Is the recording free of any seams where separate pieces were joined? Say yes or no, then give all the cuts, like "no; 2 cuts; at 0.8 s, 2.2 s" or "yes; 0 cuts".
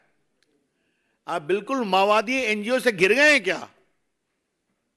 yes; 0 cuts